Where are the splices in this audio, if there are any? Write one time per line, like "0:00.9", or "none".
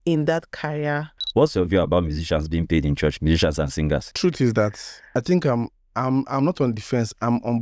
0:01.2
0:04.1
0:04.9

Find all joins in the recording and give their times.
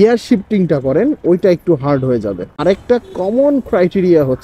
0:02.4

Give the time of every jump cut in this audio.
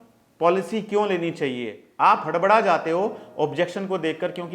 0:01.8

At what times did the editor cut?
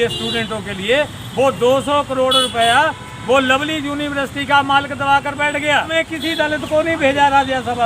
0:05.9

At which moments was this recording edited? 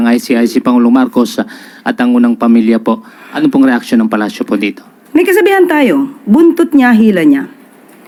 none

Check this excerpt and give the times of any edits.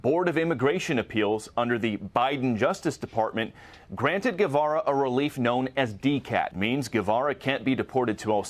0:06.5

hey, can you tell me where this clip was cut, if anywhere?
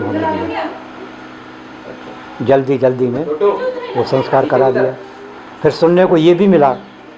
none

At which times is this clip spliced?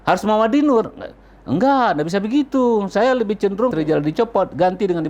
0:03.7

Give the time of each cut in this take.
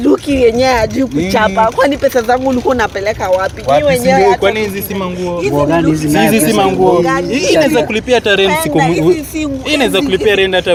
none

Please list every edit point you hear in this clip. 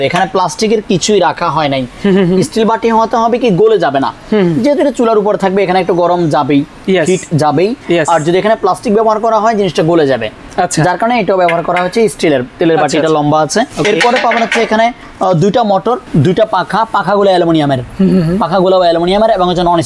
none

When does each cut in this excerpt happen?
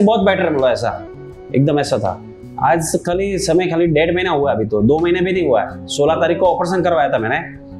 none

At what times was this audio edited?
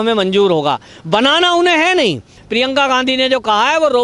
0:02.4

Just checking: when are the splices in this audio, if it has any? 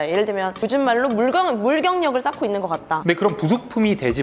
0:03.0

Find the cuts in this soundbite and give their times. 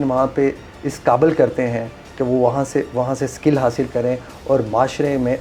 none

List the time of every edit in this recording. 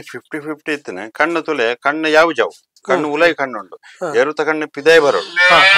none

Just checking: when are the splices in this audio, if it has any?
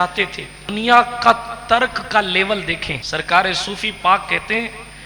0:00.7
0:02.9

